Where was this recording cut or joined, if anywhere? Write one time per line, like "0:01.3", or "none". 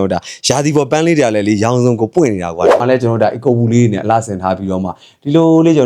0:02.8